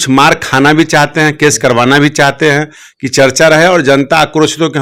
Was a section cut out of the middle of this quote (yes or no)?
no